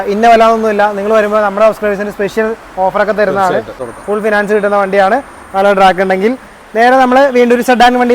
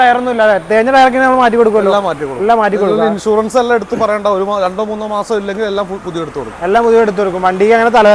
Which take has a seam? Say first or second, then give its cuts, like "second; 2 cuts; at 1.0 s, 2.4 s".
first; 1 cut; at 3.9 s